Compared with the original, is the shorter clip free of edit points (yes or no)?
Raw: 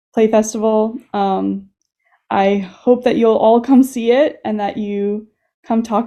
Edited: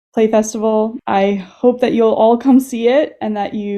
no